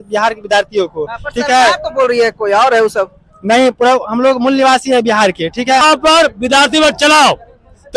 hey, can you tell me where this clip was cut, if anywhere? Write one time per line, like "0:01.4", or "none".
0:05.8